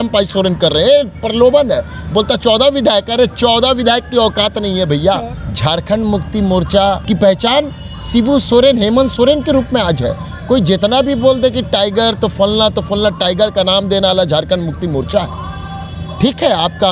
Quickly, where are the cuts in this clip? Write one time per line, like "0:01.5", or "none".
0:05.3
0:07.0